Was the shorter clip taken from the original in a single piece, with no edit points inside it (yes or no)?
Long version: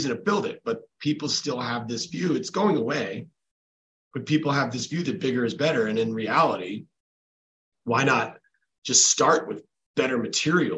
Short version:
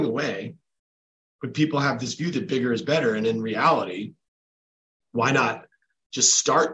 yes